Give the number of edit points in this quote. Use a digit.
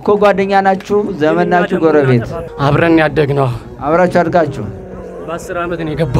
1